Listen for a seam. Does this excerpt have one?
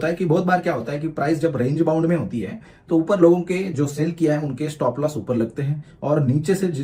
no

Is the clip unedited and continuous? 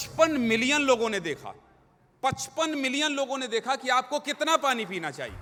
yes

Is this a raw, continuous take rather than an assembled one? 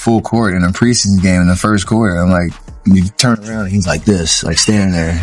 yes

